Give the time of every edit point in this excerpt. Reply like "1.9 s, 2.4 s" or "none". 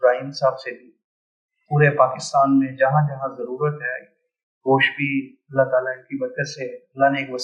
none